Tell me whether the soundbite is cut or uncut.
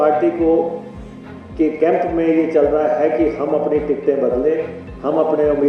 uncut